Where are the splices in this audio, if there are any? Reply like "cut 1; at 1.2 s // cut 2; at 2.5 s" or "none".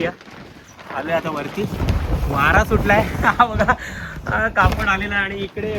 none